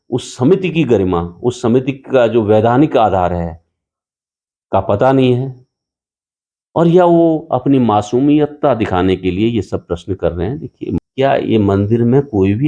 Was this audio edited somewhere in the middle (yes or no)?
yes